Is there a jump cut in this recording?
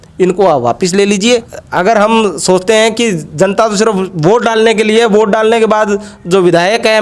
yes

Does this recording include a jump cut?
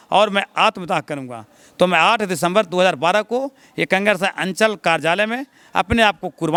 no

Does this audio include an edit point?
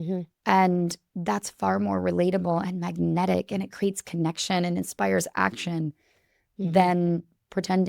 no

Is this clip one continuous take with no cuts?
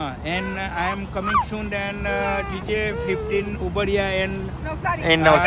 yes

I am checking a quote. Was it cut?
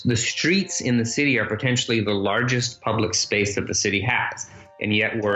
no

